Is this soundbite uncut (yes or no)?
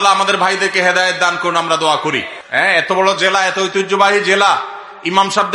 no